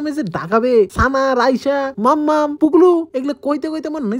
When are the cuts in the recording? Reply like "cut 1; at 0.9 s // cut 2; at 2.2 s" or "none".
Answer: cut 1; at 0.9 s // cut 2; at 1.9 s // cut 3; at 3.1 s